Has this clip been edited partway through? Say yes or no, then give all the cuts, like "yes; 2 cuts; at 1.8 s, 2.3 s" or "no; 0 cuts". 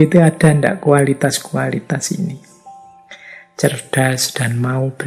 no; 0 cuts